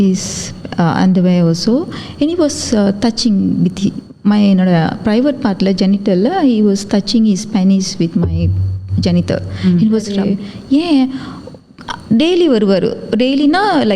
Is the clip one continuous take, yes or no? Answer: no